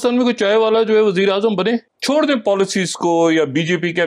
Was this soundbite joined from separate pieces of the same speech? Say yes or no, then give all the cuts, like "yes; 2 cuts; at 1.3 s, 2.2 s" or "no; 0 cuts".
yes; 1 cut; at 1.9 s